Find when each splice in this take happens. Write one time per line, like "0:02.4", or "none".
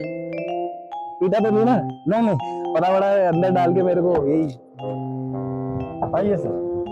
none